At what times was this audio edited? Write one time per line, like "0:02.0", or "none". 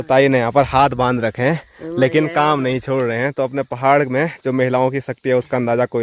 none